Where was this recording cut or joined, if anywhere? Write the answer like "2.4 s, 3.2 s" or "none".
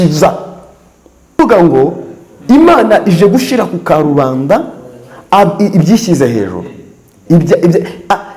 1.4 s